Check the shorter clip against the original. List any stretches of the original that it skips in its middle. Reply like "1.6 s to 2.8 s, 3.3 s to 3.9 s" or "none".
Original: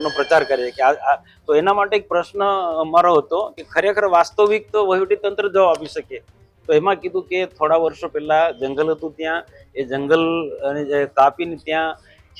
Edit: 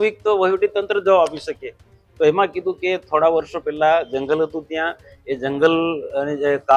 none